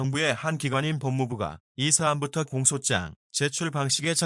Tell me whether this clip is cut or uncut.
uncut